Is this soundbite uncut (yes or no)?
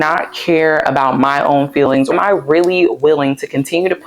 no